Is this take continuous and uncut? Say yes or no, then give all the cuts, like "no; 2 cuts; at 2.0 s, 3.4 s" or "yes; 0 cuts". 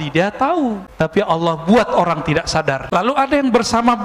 no; 2 cuts; at 1.0 s, 3.1 s